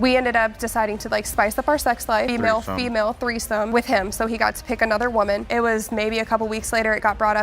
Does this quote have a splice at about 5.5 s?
yes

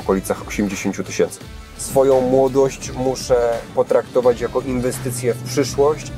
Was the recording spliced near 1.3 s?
yes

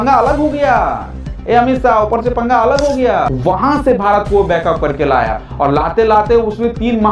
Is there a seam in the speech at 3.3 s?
yes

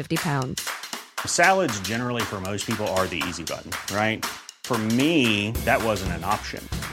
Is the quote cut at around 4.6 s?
no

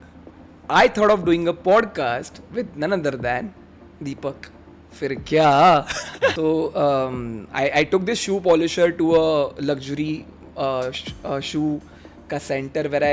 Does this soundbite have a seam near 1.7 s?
no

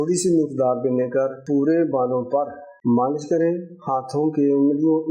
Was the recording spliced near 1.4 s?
yes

